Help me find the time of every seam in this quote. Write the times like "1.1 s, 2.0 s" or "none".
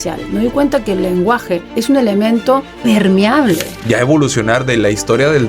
1.7 s, 2.7 s, 3.7 s